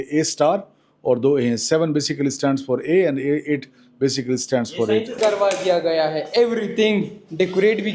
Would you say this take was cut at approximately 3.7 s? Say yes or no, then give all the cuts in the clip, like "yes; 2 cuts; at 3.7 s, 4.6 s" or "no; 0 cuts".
no; 1 cut; at 5.1 s